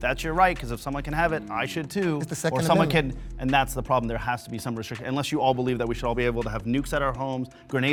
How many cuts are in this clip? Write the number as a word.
zero